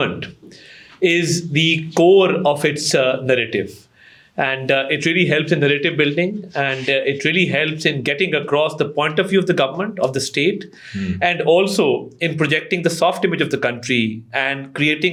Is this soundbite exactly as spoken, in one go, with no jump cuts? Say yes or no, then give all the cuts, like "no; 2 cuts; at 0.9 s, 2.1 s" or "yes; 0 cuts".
yes; 0 cuts